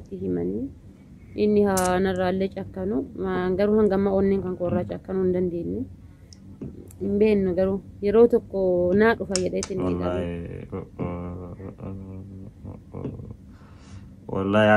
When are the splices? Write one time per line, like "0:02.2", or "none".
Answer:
none